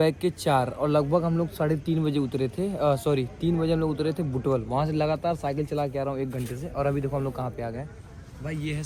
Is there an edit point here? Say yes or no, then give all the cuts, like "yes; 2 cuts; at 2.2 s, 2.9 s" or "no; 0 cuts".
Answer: no; 0 cuts